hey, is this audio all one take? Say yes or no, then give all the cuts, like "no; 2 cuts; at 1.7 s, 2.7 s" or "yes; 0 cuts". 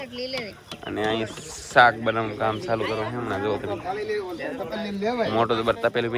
yes; 0 cuts